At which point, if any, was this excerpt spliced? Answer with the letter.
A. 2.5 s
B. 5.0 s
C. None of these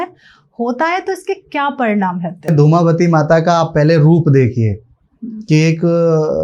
A